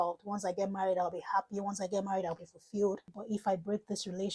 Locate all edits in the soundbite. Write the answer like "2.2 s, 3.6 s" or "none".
3.1 s